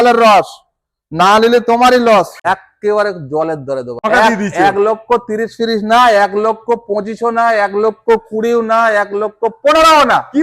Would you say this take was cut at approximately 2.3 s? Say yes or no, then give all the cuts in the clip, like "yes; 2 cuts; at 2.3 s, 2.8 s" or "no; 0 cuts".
yes; 2 cuts; at 2.3 s, 4.0 s